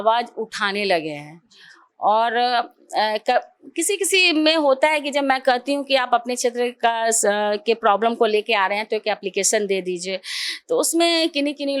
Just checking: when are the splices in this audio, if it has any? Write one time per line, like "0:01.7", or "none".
none